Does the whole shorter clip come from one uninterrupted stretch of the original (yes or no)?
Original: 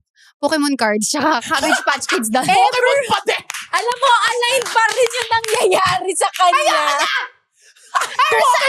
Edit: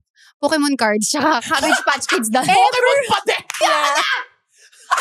no